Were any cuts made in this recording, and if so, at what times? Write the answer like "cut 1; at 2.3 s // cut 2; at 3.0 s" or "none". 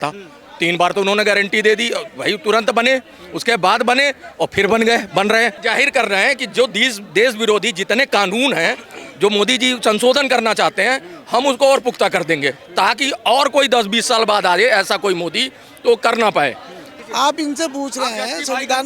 cut 1; at 5.6 s // cut 2; at 16.8 s